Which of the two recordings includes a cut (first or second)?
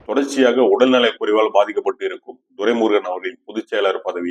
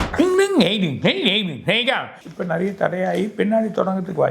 second